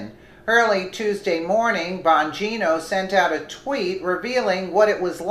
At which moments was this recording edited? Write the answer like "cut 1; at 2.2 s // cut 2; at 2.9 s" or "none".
cut 1; at 3.3 s